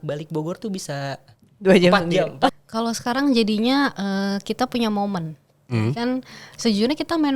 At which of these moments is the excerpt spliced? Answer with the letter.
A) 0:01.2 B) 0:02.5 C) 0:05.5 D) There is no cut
B